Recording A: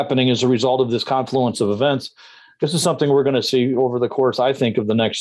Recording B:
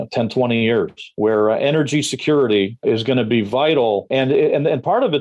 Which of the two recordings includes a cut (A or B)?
B